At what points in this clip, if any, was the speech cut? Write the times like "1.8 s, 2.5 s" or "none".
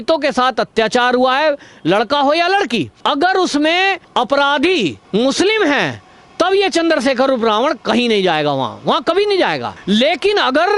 2.9 s, 4.0 s, 5.0 s, 9.7 s